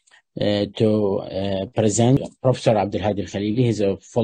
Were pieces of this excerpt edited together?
yes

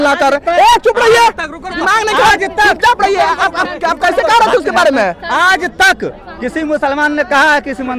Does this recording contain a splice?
no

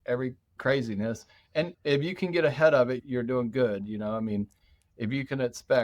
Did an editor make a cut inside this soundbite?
yes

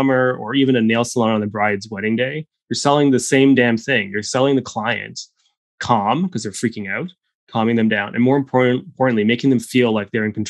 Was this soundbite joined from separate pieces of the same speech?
no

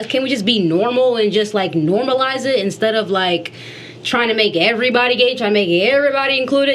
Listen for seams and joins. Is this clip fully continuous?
yes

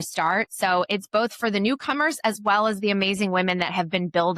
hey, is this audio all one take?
yes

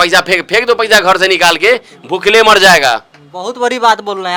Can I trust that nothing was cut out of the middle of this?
yes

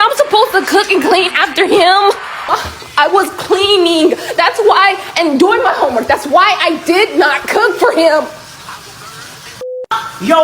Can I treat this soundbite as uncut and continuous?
no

